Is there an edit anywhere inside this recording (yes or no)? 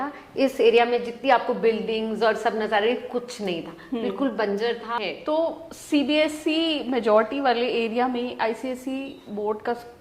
yes